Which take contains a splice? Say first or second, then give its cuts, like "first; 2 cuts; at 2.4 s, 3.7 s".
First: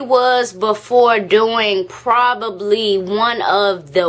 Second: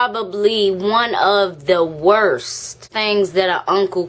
second; 1 cut; at 2.9 s